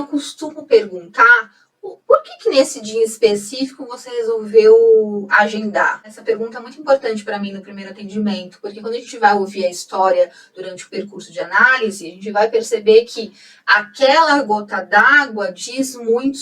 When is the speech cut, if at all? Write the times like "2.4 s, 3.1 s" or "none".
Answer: 6.1 s